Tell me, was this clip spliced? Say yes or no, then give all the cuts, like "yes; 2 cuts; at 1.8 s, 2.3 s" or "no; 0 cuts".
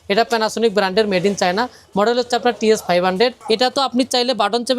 yes; 1 cut; at 3.4 s